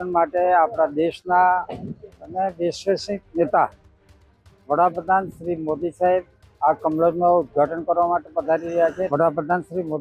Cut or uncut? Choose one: cut